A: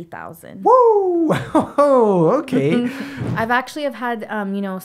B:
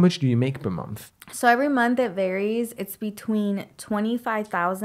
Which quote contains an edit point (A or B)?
A